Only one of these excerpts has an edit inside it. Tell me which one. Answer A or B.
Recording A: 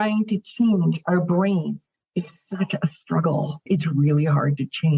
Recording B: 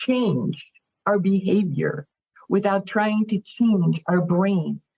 A